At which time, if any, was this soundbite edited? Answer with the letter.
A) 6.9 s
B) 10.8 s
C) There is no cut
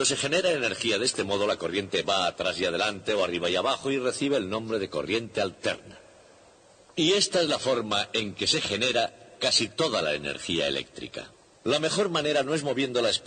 B